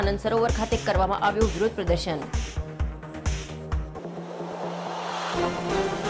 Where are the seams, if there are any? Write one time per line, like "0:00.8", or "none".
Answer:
none